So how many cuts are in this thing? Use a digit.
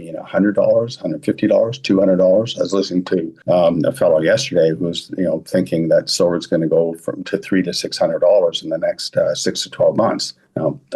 1